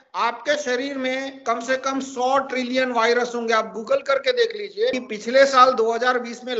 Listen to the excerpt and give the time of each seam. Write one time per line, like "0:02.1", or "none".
0:05.0